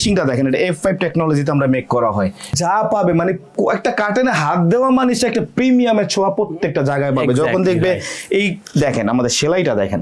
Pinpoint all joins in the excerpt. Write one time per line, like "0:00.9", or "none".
0:02.5